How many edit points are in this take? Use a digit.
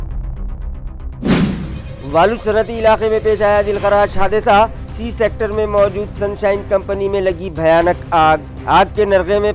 1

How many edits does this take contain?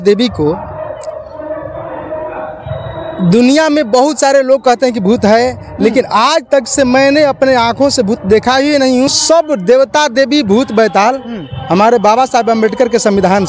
1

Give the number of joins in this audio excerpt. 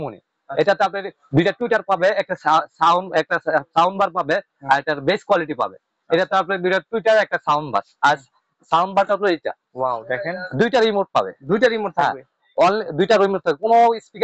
0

